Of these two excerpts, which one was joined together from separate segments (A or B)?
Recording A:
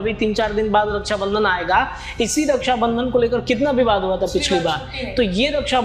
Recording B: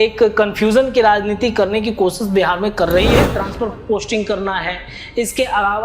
B